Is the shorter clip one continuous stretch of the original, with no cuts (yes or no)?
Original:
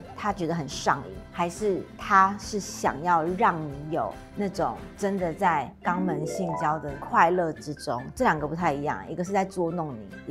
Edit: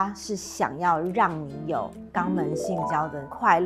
no